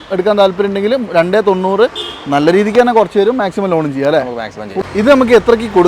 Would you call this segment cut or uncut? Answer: cut